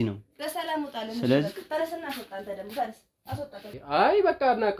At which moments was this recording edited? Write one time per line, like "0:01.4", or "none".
0:03.7